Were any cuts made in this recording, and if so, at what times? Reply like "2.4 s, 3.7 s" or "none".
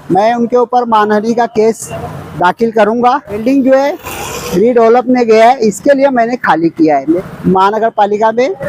3.4 s, 7.2 s

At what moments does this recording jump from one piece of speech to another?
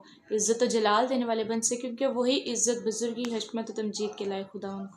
4.1 s

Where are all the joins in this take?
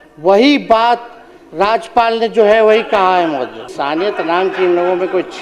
3.7 s

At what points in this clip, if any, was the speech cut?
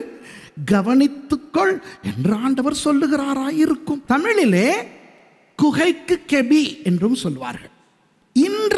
4.0 s

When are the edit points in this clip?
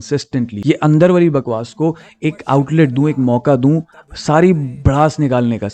none

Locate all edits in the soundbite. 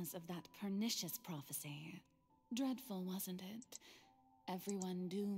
none

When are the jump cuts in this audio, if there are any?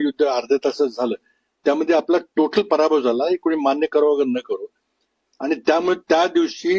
none

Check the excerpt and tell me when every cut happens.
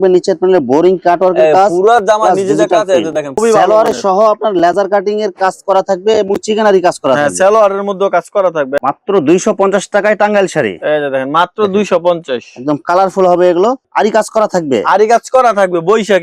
3.4 s, 8.7 s, 13.8 s

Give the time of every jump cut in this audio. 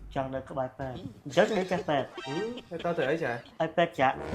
1.1 s

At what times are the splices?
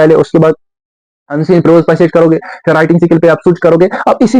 none

